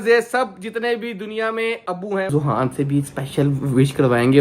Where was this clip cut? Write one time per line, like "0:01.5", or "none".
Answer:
0:02.3